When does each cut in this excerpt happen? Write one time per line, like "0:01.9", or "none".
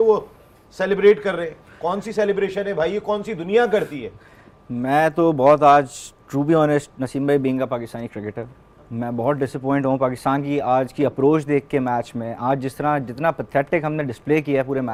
none